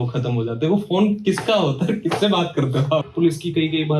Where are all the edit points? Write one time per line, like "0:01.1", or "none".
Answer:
0:03.0